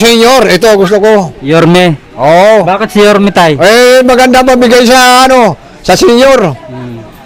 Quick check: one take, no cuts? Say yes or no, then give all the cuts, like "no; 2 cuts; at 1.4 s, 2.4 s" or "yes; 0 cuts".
yes; 0 cuts